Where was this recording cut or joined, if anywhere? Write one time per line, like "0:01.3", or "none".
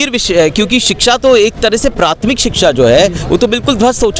none